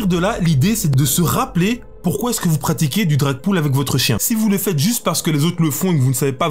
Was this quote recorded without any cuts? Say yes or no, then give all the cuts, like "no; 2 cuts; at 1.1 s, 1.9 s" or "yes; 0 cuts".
no; 1 cut; at 0.9 s